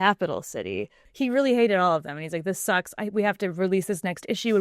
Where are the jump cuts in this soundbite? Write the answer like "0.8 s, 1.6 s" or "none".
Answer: 1.0 s

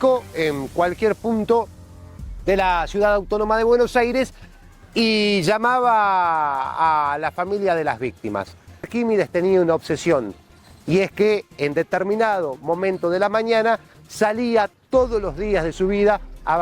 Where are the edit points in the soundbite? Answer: 8.9 s

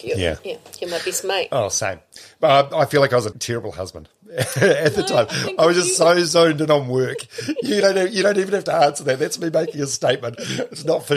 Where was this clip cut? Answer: 3.4 s

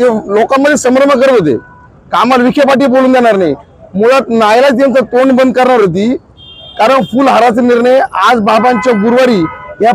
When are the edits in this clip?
none

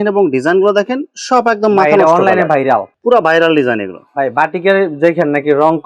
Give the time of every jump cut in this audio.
none

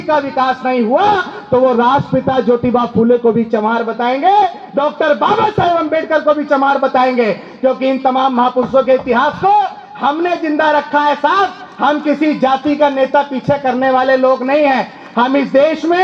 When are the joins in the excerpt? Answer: none

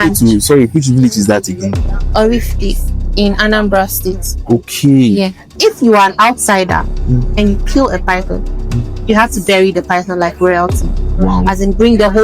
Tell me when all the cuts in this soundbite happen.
5.5 s

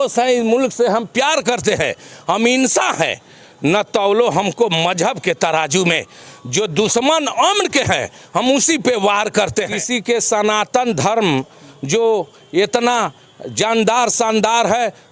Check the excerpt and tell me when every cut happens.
9.8 s

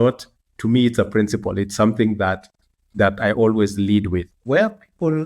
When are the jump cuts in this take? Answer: 4.3 s

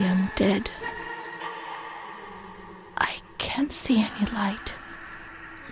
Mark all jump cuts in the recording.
0.8 s, 2.9 s

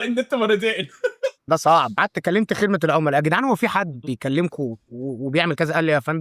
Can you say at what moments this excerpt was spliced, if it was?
none

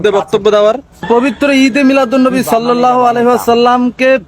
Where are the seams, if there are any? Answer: 1.1 s

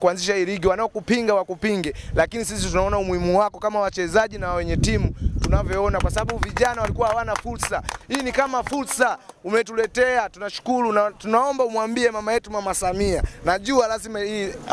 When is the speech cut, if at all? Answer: none

